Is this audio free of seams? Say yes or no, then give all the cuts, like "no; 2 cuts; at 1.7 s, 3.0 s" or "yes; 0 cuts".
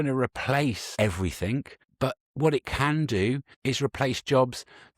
no; 3 cuts; at 0.8 s, 1.8 s, 3.5 s